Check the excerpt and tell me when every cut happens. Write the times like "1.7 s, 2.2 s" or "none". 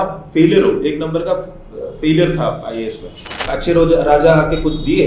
3.5 s